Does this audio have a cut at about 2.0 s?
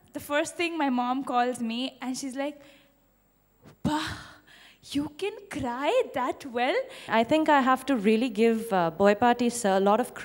no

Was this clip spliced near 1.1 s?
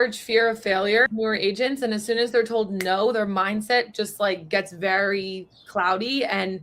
yes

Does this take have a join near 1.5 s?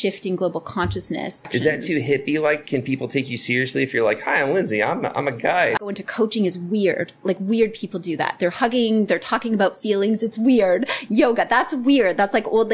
yes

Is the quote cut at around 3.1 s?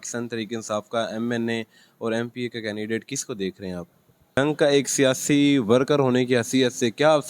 no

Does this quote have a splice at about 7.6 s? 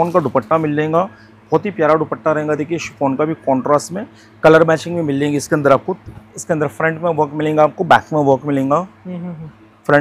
no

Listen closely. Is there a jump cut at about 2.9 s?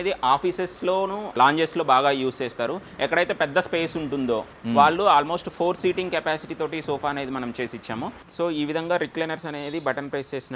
no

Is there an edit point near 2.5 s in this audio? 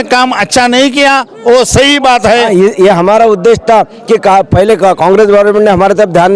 yes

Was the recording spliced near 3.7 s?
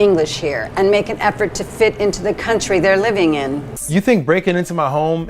yes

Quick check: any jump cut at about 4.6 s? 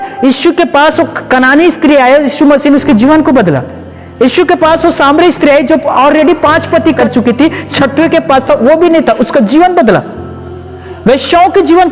no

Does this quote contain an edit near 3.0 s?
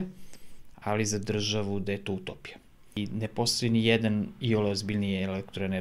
yes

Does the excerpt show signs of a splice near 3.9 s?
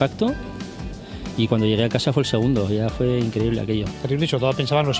yes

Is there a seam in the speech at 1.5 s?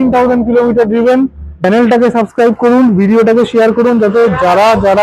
yes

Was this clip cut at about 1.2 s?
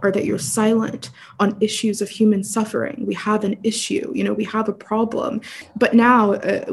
no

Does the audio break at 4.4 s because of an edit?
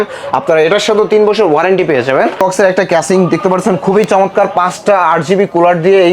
no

